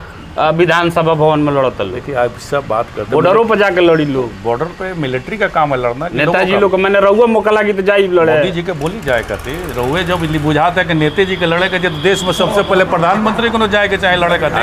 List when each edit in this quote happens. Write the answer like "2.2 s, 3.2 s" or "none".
none